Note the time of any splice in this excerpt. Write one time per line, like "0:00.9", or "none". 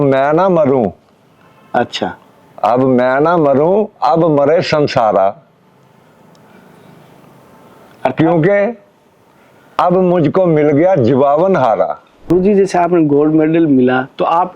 0:12.3